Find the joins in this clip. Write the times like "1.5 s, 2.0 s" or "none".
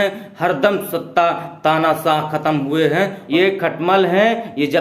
3.2 s